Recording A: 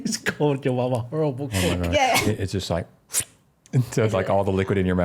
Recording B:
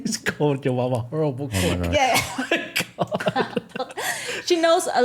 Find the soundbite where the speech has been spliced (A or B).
A